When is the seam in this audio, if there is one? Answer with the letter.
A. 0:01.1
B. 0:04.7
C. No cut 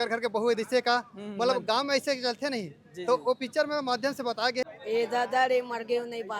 B